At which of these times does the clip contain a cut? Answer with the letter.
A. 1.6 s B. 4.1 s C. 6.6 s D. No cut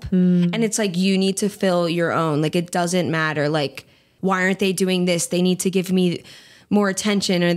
B